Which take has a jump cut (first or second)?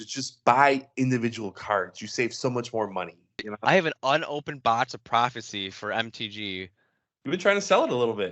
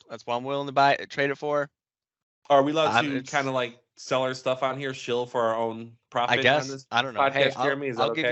first